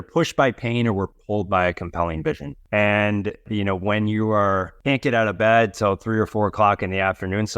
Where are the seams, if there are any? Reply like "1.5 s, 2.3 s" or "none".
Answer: 2.5 s, 3.5 s, 4.7 s

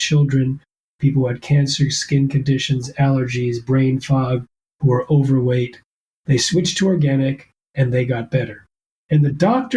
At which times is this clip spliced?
none

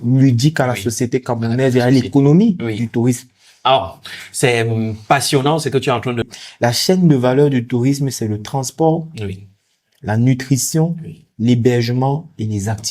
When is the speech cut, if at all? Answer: 6.3 s

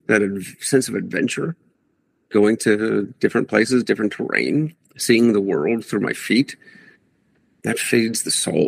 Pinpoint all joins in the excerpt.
none

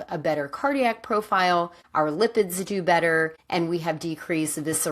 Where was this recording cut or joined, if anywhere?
1.8 s, 3.4 s

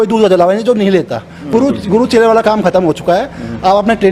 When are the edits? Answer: 1.4 s

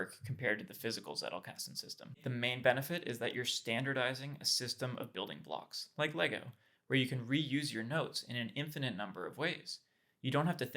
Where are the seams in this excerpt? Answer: 2.2 s

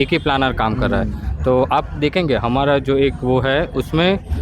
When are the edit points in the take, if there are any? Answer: none

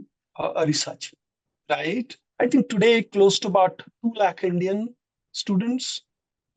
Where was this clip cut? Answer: 2.2 s

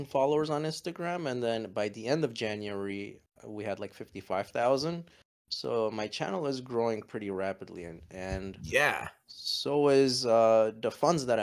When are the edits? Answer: none

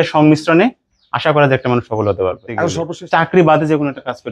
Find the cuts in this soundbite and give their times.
2.7 s

